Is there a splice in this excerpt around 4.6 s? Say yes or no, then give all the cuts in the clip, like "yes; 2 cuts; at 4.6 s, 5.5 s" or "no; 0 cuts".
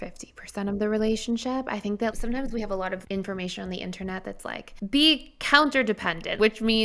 yes; 2 cuts; at 3.0 s, 4.6 s